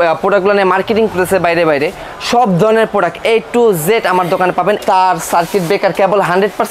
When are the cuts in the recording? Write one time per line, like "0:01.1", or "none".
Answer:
0:04.8

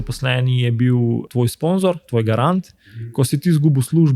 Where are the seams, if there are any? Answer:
0:01.3

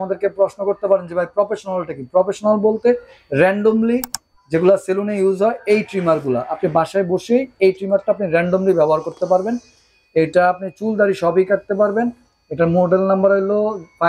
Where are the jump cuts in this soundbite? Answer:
none

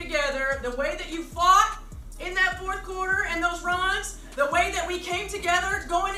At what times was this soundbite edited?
none

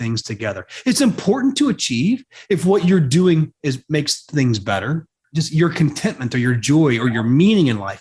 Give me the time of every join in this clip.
0:05.2

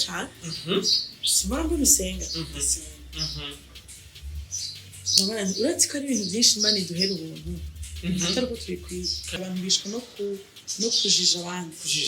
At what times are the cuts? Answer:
0:09.4

